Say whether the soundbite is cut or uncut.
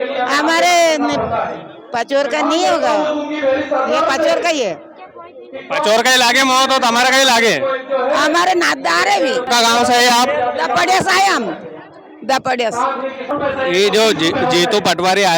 cut